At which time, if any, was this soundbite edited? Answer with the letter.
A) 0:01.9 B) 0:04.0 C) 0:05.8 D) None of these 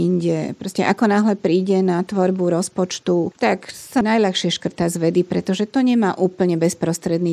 B